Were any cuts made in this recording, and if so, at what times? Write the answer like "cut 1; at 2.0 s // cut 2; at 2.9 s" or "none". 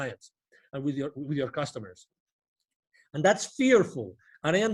none